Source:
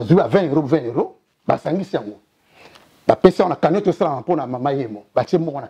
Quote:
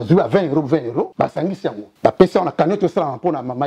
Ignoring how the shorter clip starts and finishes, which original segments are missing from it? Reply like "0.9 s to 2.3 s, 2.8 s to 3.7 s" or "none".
1.3 s to 2.3 s

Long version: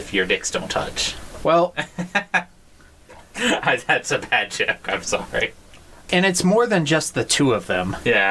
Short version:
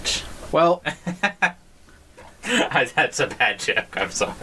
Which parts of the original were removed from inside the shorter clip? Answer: none

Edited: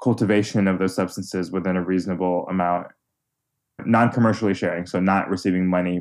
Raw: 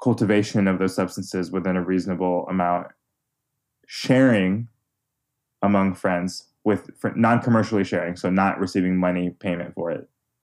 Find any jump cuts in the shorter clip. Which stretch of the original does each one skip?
3.7 s to 7.0 s

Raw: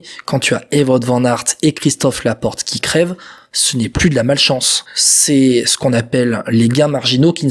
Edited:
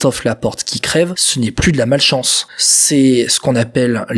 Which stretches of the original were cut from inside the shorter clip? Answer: 3.2 s to 3.6 s

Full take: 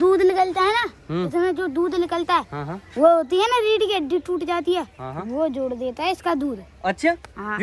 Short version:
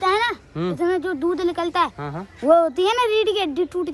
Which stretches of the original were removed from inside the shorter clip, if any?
none

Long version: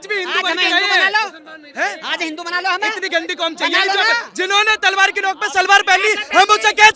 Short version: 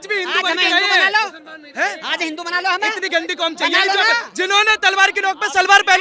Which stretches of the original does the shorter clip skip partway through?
none

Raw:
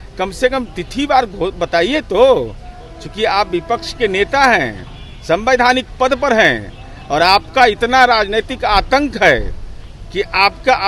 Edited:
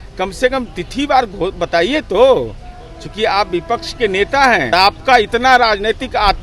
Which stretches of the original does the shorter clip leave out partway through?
4.7 s to 7.2 s

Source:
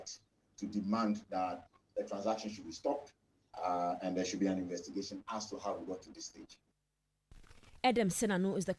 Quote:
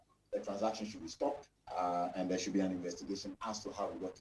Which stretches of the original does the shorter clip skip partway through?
3.2 s to 3.4 s

